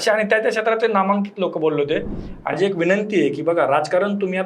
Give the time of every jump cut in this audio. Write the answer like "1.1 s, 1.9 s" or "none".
2.6 s

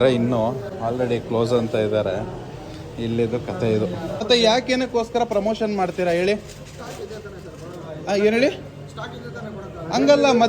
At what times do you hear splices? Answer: 4.2 s

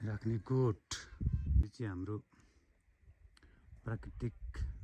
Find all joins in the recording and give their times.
1.6 s

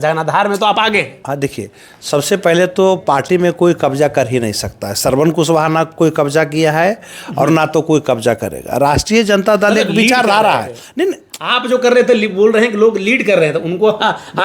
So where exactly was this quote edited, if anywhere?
none

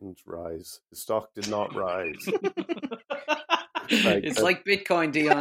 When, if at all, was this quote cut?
none

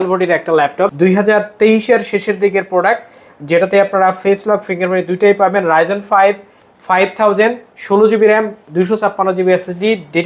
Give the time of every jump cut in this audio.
0.9 s

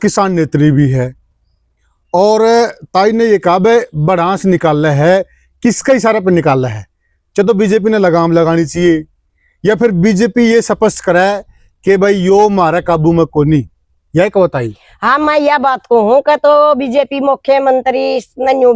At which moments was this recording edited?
none

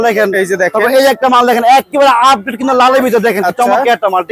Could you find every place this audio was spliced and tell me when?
none

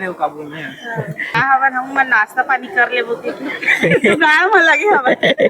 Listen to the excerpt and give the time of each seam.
1.4 s

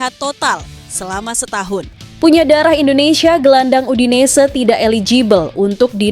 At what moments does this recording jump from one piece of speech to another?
2.1 s

